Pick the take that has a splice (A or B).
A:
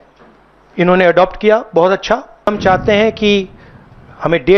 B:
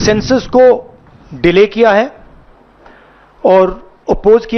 A